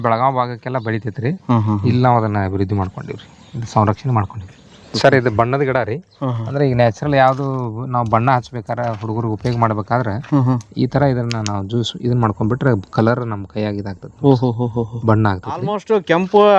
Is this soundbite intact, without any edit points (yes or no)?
no